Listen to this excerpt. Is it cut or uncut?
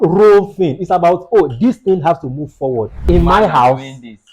cut